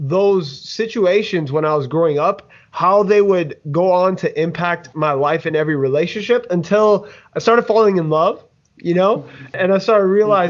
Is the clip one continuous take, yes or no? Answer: no